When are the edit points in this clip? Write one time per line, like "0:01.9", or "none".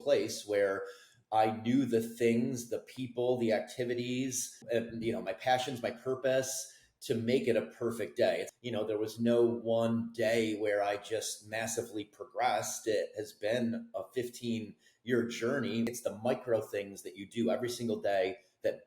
0:08.5
0:15.9